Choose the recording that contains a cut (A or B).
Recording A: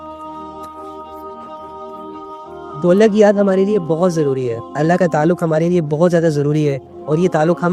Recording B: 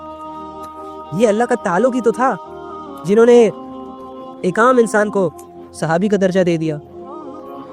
B